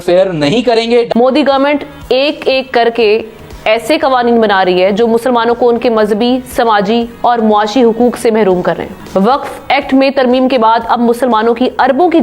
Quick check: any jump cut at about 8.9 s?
yes; 2 cuts; at 1.1 s, 8.9 s

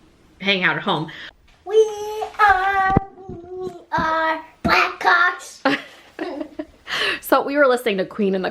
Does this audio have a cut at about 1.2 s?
yes; 1 cut; at 1.2 s

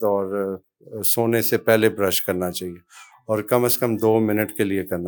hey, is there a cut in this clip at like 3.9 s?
no; 0 cuts

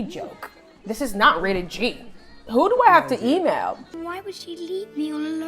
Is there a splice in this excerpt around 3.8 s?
yes; 1 cut; at 3.8 s

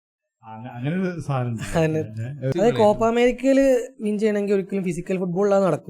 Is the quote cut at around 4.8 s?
no; 1 cut; at 2.5 s

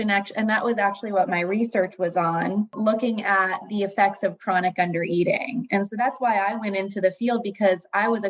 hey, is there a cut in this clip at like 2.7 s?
yes; 1 cut; at 2.7 s

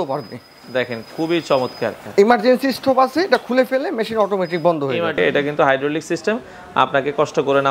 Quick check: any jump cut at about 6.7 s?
no; 2 cuts; at 2.0 s, 5.2 s

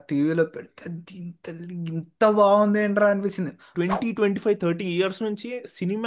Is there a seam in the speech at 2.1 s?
no; 1 cut; at 3.6 s

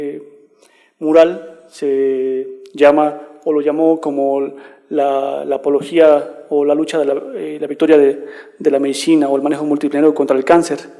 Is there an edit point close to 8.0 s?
no; 1 cut; at 5.5 s

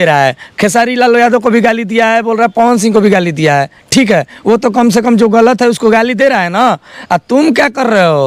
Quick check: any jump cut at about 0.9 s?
no; 0 cuts

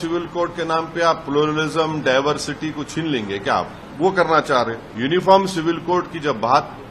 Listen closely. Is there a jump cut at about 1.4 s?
no; 2 cuts; at 3.8 s, 4.8 s

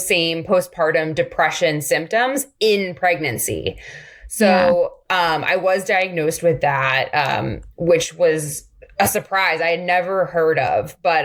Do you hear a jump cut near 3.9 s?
no; 0 cuts

